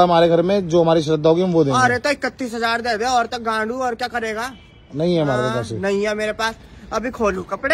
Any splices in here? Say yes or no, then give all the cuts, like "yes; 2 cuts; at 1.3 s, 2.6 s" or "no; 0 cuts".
no; 0 cuts